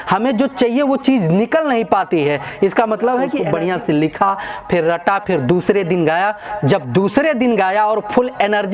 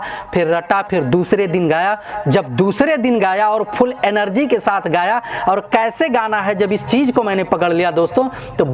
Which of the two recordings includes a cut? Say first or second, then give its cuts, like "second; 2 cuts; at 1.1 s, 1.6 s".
first; 1 cut; at 3.4 s